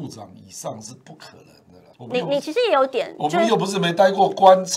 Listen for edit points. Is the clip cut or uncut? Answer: cut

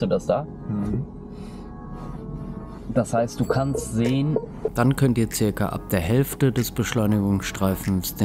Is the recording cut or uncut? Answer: cut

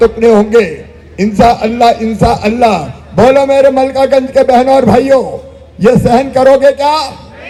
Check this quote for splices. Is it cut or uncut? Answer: uncut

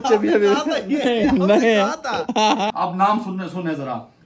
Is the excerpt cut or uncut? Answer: cut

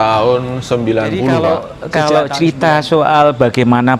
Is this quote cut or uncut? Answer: cut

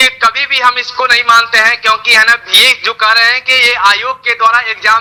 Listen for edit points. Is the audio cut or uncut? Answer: uncut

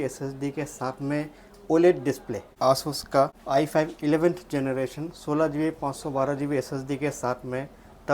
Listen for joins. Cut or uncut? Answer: cut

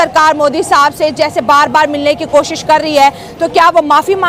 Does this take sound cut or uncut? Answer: uncut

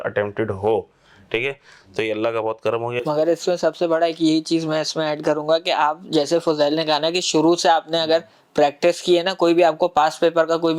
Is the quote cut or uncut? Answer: uncut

